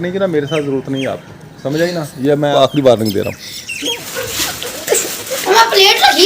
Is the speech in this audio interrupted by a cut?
yes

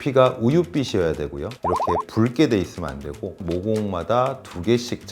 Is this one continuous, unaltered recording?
no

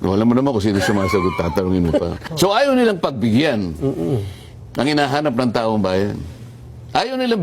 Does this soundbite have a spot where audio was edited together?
yes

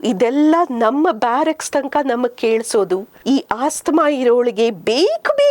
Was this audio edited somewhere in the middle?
yes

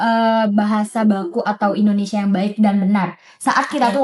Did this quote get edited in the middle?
no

